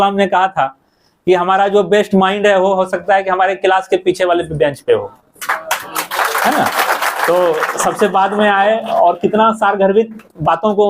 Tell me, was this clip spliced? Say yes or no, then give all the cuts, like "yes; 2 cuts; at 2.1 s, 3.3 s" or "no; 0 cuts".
no; 0 cuts